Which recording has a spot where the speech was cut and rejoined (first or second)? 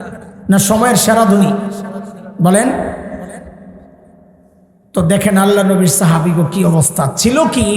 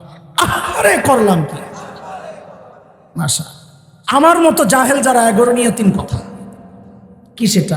second